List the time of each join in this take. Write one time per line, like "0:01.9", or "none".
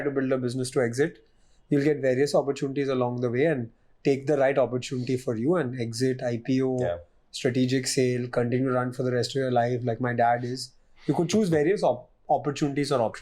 none